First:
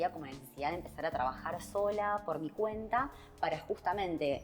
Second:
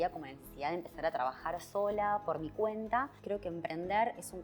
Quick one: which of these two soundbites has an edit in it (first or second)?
second